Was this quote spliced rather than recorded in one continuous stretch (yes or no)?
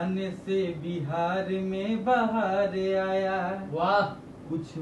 no